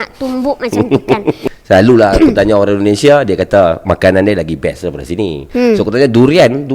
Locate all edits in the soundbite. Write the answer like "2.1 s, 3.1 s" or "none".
1.5 s